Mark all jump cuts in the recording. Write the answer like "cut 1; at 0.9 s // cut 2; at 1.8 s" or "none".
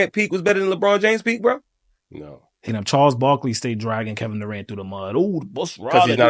cut 1; at 2.7 s